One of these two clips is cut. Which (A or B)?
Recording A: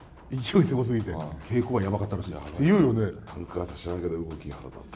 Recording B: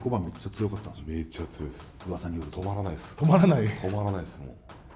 A